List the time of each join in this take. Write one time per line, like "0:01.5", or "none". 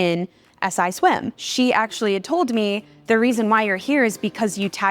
0:01.4